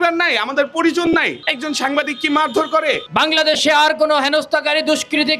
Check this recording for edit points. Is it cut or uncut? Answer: cut